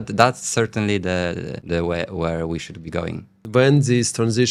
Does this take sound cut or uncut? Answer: cut